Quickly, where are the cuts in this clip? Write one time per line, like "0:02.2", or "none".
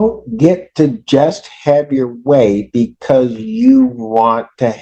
none